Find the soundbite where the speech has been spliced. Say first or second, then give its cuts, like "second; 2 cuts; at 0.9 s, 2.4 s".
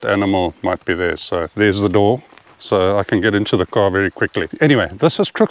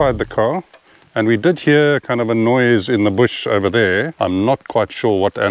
first; 2 cuts; at 1.6 s, 4.4 s